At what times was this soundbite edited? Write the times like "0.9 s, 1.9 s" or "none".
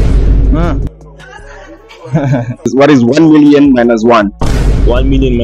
2.7 s